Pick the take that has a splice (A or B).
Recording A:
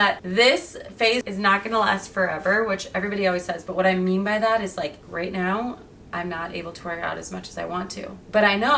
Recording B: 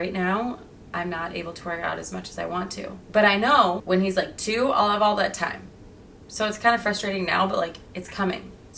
A